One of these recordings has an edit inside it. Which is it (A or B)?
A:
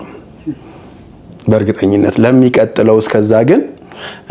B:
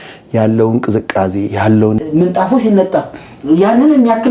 B